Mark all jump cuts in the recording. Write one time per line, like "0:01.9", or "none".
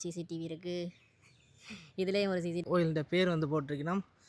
0:02.6